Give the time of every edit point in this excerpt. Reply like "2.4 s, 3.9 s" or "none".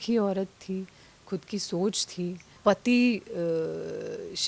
2.5 s

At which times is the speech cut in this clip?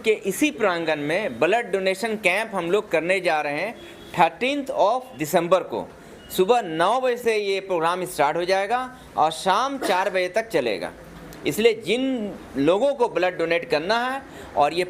none

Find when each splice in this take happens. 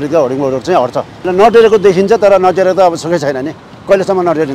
1.3 s

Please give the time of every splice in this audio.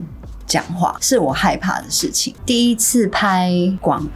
1.0 s, 2.3 s

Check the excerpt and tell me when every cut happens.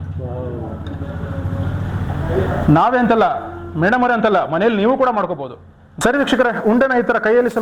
6.0 s

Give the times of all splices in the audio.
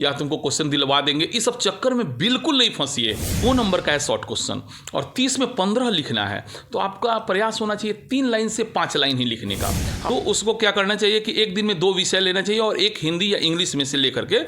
3.4 s, 9.9 s

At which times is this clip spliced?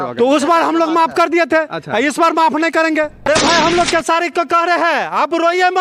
3.3 s

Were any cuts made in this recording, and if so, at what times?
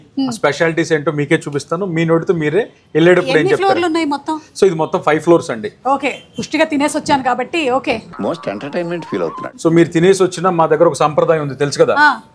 none

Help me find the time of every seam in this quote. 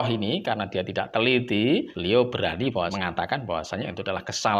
1.9 s, 2.9 s

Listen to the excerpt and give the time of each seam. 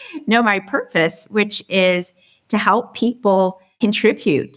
3.6 s

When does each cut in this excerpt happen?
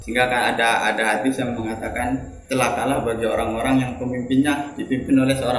2.3 s

